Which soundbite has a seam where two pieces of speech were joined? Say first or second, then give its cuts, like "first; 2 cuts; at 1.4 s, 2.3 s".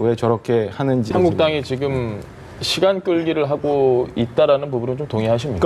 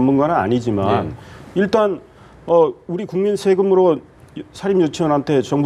first; 1 cut; at 1.1 s